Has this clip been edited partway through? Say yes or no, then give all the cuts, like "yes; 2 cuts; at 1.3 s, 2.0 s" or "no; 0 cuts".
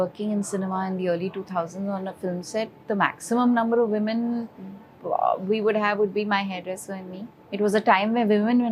no; 0 cuts